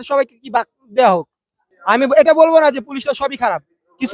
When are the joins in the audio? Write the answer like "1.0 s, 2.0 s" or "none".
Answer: 1.5 s